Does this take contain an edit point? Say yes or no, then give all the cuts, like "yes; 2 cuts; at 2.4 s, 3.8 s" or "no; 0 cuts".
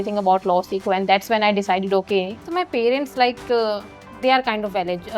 yes; 1 cut; at 2.5 s